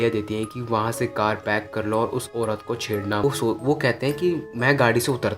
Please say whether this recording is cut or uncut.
cut